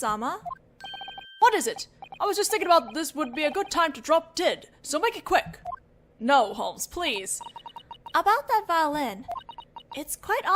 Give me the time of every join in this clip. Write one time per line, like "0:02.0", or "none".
none